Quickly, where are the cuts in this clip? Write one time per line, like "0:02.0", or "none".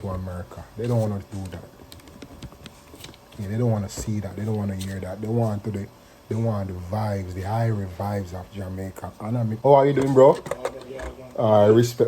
0:09.6